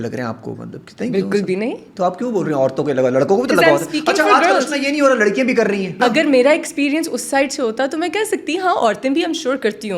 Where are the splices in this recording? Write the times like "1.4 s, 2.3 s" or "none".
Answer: 5.9 s